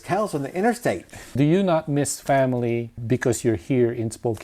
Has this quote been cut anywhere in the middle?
yes; 2 cuts; at 1.3 s, 3.0 s

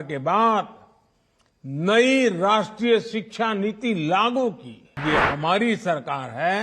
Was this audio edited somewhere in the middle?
yes; 1 cut; at 5.0 s

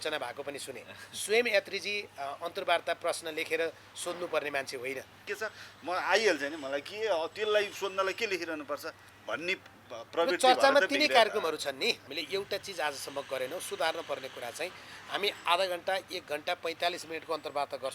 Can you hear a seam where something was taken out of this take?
yes; 2 cuts; at 5.3 s, 12.0 s

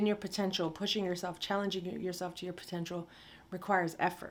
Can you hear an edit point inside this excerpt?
no; 0 cuts

